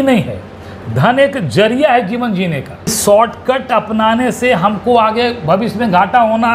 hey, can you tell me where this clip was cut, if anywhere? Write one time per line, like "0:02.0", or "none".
0:03.0